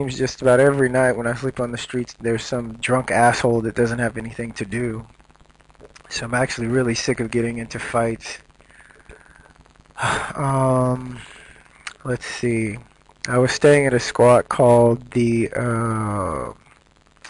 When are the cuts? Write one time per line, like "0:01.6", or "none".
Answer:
0:02.8